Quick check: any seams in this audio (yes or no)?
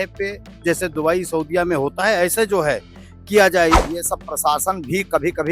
yes